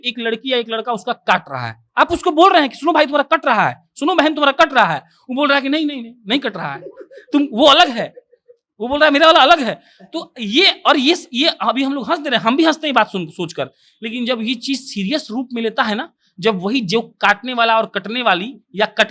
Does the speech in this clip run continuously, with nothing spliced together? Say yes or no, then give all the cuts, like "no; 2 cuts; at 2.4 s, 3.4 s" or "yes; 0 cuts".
yes; 0 cuts